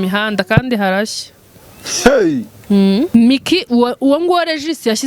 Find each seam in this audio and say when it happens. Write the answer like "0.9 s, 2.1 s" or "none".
3.1 s